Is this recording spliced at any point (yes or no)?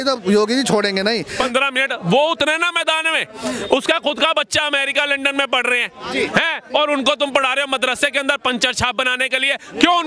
yes